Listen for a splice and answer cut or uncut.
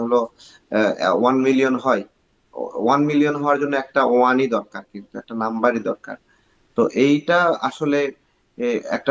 uncut